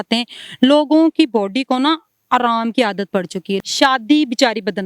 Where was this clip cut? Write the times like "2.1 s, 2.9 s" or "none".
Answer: 3.5 s